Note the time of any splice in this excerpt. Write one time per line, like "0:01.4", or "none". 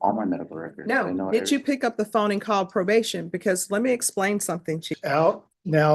0:04.9